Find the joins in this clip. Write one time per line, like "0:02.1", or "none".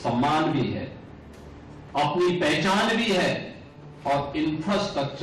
none